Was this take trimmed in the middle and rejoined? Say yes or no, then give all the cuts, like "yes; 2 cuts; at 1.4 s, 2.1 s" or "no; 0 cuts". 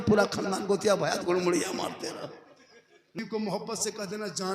yes; 1 cut; at 3.2 s